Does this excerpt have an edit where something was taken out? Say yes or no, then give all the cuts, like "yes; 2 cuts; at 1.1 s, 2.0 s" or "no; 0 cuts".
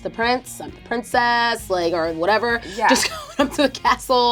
no; 0 cuts